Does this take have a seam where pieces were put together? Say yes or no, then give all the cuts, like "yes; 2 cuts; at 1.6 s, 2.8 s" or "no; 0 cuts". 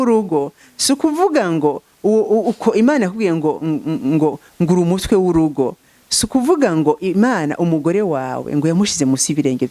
no; 0 cuts